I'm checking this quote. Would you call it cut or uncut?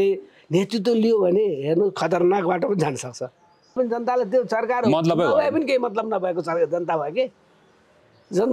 cut